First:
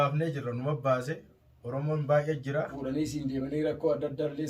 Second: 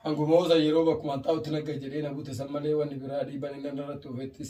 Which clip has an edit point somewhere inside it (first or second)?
first